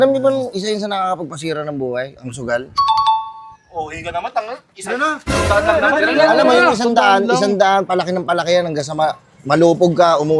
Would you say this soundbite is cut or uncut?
uncut